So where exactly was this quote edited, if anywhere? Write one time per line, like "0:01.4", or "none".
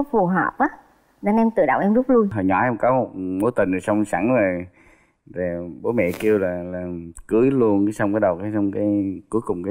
0:02.3